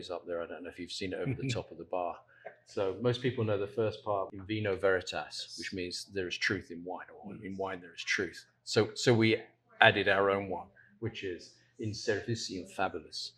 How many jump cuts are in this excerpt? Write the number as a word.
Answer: one